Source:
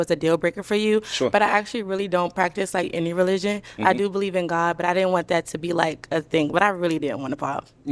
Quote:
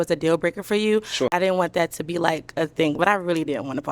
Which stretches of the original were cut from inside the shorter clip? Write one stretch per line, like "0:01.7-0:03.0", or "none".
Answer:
0:01.3-0:04.8